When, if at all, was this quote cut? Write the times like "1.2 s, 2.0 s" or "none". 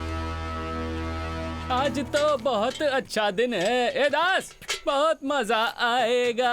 1.6 s